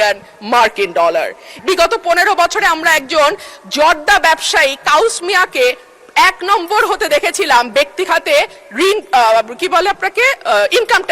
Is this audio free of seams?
no; 1 cut; at 1.5 s

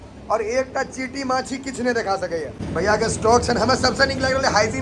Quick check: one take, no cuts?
no; 1 cut; at 2.6 s

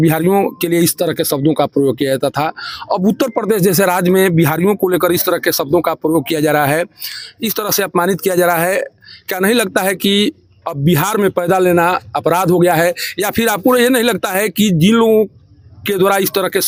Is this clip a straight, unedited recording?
yes; 0 cuts

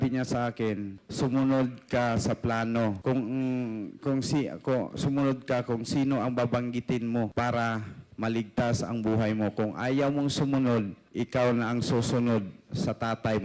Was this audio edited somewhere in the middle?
yes; 4 cuts; at 1.0 s, 3.0 s, 7.3 s, 11.0 s

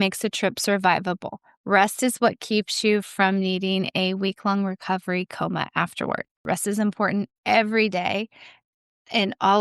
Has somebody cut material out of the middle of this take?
yes; 1 cut; at 6.4 s

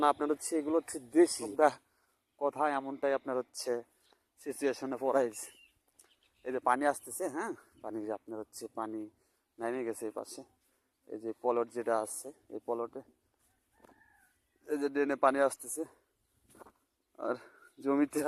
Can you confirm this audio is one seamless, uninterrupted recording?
no; 1 cut; at 1.4 s

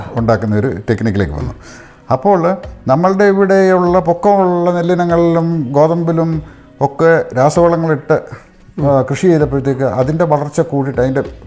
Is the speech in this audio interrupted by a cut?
no; 0 cuts

